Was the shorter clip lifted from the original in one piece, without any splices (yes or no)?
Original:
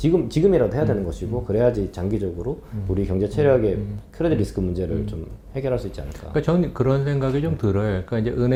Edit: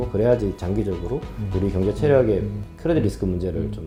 yes